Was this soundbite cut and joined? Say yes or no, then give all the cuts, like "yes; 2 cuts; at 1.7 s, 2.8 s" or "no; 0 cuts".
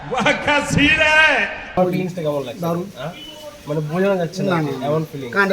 yes; 1 cut; at 1.8 s